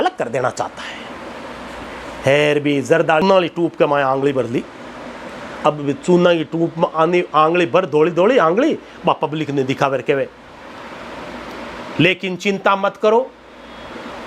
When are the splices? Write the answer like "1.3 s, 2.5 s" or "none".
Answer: 3.2 s